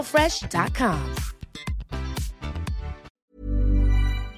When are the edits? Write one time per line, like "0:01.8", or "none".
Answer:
0:03.0

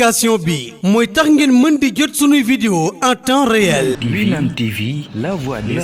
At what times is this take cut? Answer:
0:04.0

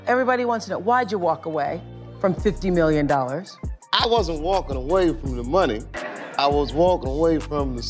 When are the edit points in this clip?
none

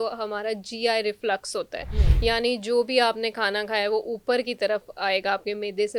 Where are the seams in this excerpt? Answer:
none

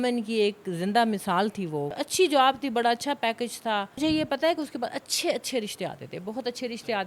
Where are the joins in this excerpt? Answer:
0:02.0
0:04.0

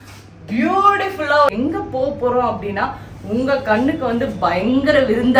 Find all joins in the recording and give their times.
0:01.5

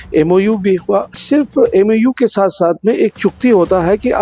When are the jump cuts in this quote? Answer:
0:01.2

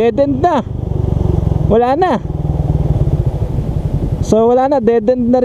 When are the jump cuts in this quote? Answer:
none

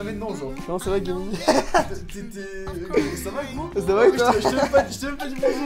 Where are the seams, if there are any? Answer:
none

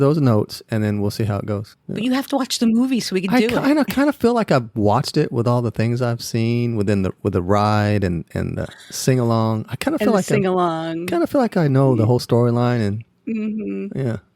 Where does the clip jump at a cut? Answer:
0:01.8

